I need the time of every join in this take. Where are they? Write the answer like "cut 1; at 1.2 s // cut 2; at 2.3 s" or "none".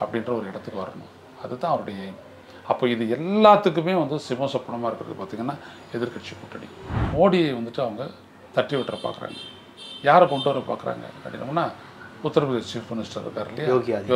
cut 1; at 7.0 s